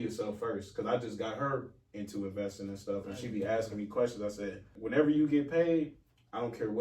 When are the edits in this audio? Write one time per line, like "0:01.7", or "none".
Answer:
0:04.8